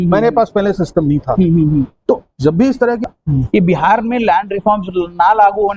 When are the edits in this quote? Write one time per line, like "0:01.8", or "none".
0:03.1

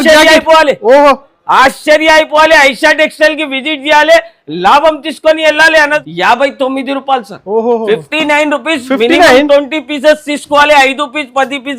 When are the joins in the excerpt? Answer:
0:06.0

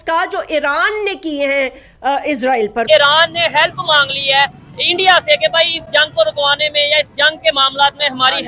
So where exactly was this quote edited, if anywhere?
0:02.9

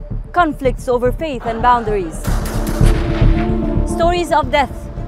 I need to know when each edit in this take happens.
0:02.0

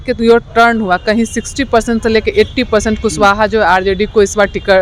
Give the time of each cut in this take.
none

